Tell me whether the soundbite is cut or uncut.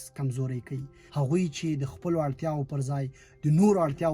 cut